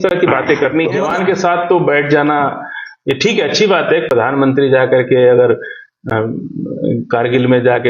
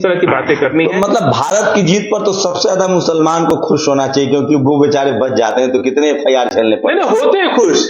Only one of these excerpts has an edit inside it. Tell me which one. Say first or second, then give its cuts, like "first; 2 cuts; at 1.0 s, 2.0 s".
first; 1 cut; at 1.0 s